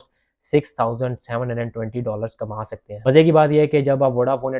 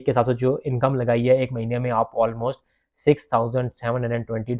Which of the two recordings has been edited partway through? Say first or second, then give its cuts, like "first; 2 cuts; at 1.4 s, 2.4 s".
first; 1 cut; at 3.1 s